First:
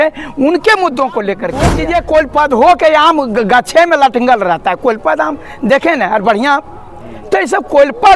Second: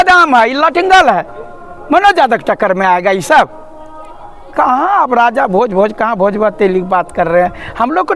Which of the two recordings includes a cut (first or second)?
first